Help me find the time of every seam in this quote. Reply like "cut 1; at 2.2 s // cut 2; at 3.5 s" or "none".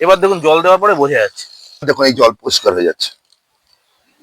cut 1; at 1.9 s